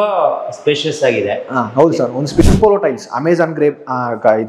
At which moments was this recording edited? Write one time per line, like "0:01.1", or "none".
0:02.4